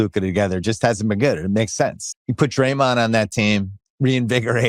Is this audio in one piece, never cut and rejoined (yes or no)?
no